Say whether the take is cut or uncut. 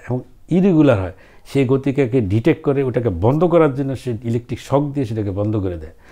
uncut